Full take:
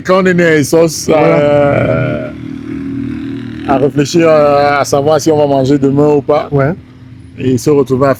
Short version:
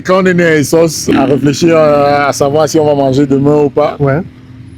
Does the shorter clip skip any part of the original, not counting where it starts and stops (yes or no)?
yes